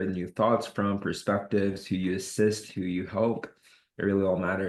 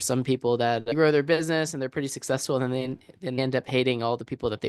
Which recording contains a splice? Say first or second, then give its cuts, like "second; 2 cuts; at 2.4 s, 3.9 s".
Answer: second; 2 cuts; at 0.9 s, 3.4 s